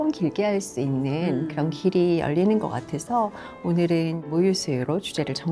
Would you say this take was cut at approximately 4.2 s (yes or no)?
yes